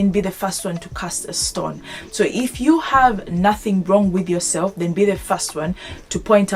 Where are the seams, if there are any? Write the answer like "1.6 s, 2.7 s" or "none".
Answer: none